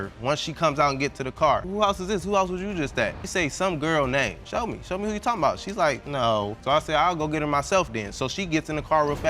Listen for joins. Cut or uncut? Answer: cut